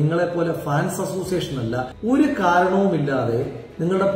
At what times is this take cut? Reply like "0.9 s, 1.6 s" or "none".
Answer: 1.9 s